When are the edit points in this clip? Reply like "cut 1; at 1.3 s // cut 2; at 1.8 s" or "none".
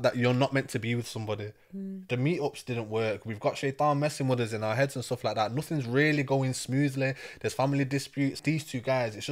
cut 1; at 8.4 s